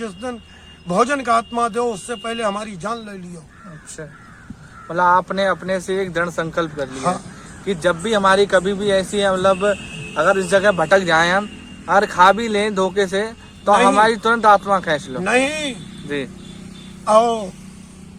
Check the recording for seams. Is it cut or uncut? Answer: uncut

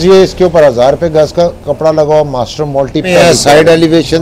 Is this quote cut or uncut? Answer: cut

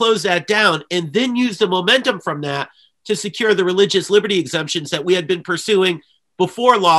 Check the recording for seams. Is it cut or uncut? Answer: uncut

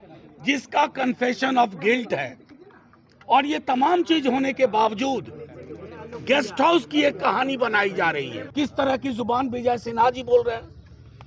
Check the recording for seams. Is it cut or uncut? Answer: cut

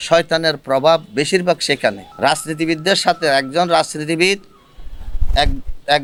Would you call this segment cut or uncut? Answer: uncut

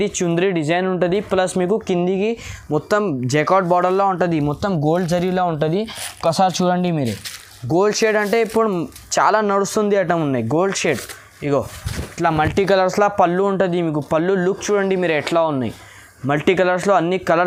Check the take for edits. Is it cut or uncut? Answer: uncut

